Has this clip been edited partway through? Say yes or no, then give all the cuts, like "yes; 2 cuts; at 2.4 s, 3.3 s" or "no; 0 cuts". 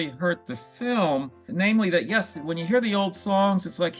yes; 1 cut; at 1.5 s